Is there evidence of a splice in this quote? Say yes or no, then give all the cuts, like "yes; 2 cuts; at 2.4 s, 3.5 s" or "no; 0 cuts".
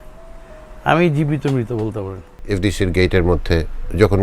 yes; 1 cut; at 2.3 s